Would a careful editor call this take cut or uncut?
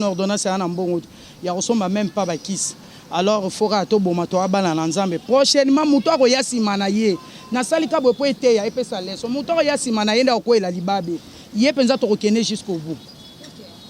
uncut